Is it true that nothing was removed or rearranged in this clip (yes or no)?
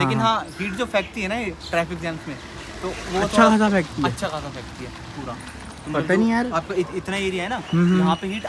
yes